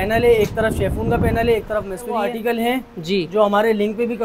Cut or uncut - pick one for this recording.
cut